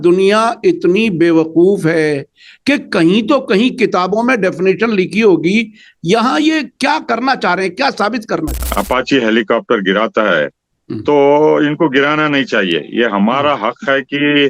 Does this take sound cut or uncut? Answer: cut